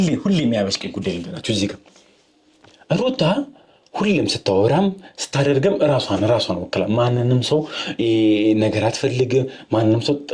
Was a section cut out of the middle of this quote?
no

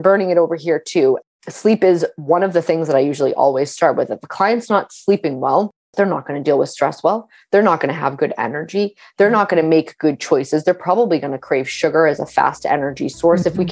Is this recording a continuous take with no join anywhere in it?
no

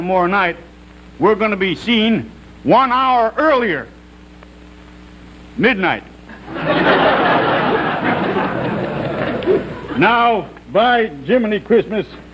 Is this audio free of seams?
no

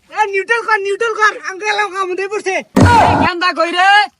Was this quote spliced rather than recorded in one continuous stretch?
yes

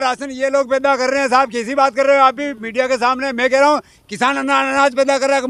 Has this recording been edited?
no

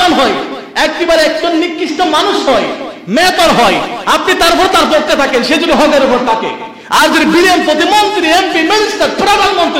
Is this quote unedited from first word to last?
yes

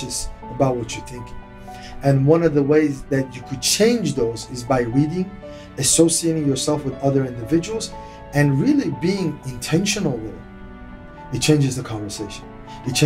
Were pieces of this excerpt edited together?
yes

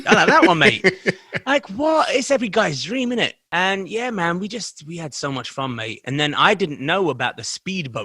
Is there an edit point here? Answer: yes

